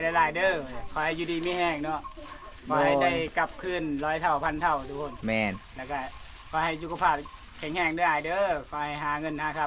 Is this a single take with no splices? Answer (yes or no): yes